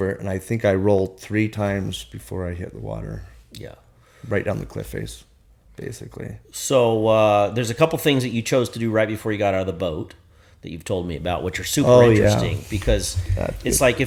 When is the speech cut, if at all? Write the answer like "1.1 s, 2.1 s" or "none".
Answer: none